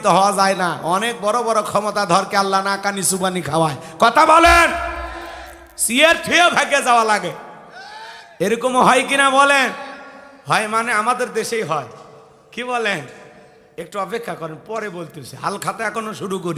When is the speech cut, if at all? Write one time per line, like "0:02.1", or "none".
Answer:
none

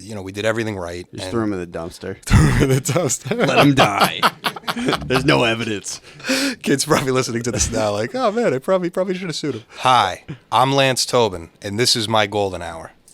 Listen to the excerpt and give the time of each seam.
0:09.7

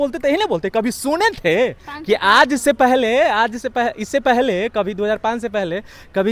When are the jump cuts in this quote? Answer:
none

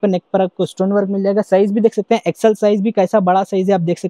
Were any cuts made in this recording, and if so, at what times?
none

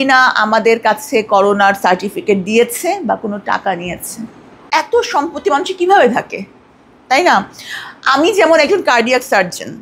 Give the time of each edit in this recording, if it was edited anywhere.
0:04.7

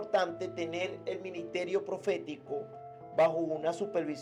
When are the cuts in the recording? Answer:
none

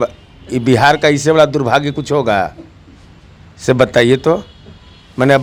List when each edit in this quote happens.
none

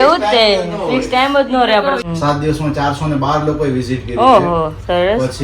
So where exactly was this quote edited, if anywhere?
0:02.0

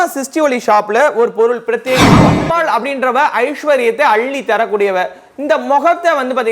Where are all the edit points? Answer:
0:02.3

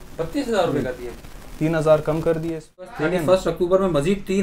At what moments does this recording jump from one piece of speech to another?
0:02.9

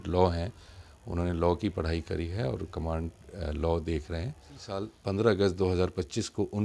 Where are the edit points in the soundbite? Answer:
0:04.9

